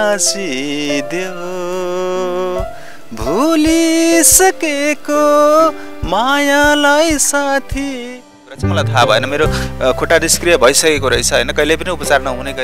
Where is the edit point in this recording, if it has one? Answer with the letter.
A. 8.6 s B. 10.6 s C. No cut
A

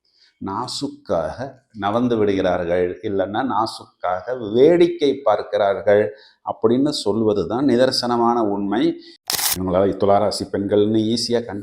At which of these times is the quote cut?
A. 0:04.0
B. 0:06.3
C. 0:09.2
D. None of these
C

